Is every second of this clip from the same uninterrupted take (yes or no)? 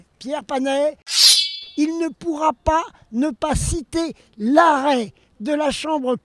no